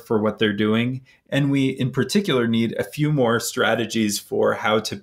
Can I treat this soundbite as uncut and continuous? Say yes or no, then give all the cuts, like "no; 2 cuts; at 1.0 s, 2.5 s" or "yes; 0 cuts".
no; 1 cut; at 1.1 s